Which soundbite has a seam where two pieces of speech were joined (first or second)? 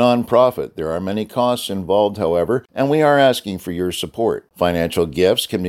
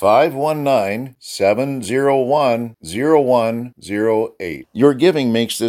first